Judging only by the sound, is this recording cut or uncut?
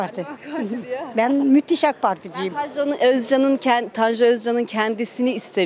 uncut